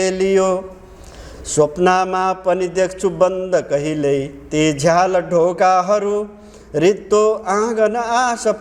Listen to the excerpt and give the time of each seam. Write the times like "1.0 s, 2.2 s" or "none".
none